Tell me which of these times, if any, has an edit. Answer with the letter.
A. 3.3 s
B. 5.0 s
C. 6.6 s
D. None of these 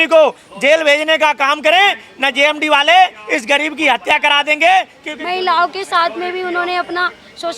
B